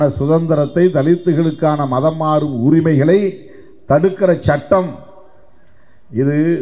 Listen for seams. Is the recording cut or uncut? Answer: uncut